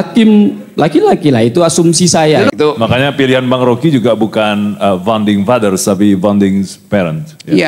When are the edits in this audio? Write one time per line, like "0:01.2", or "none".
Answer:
0:02.5